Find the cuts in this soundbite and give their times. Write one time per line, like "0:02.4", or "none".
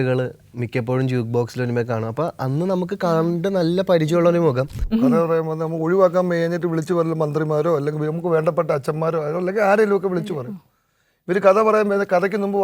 0:04.8